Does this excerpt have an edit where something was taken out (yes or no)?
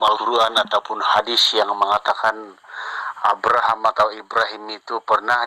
no